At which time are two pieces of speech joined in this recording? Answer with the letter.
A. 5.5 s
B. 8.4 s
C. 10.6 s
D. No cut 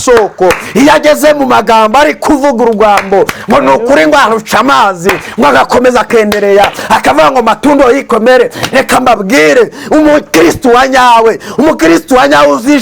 D